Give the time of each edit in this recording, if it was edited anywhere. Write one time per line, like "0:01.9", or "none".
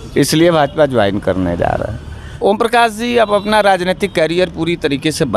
0:02.3